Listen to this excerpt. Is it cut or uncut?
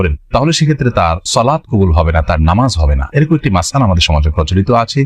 uncut